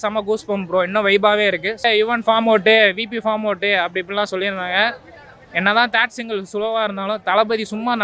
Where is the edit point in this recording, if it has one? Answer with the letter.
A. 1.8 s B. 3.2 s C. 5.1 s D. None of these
A